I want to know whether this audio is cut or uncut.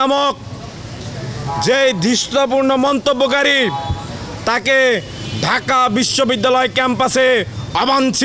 uncut